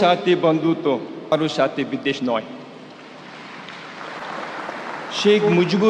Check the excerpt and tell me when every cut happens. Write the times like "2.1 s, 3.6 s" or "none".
1.3 s